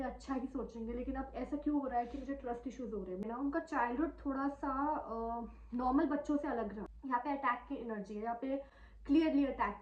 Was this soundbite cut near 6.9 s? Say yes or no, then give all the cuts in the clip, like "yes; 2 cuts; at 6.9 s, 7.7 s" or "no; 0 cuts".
yes; 2 cuts; at 3.2 s, 6.9 s